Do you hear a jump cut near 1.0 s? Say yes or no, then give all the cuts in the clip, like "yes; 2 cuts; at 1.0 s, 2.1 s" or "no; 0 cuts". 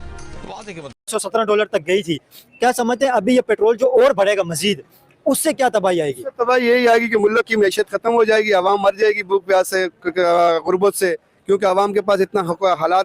yes; 1 cut; at 1.0 s